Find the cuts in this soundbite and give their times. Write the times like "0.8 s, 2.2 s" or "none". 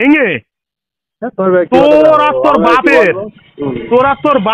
none